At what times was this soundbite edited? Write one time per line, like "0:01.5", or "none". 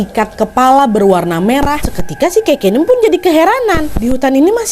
0:02.0
0:03.9

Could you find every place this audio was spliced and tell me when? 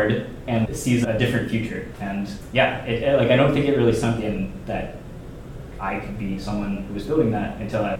none

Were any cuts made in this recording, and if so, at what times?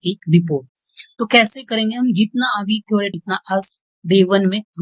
0:03.1

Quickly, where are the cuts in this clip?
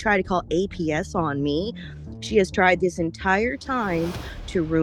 none

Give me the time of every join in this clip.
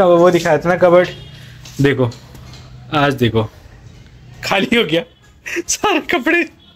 none

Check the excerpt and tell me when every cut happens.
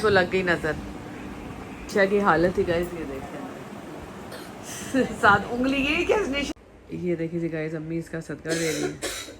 0:01.9
0:06.5

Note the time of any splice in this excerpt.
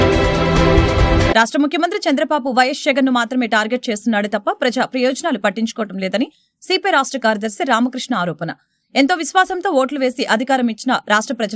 none

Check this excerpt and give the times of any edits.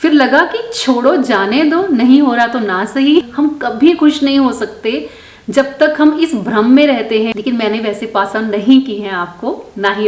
0:03.3
0:07.3

